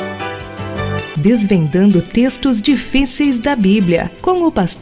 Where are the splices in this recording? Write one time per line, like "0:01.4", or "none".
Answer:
none